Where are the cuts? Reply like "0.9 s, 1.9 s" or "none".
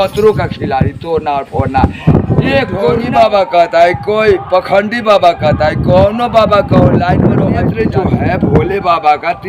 3.0 s, 7.7 s